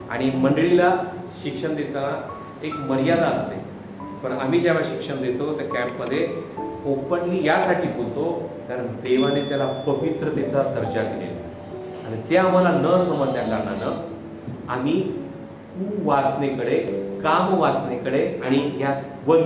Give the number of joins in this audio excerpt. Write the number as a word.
zero